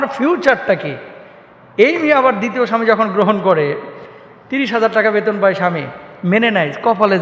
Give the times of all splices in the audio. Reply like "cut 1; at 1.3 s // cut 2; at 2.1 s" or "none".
none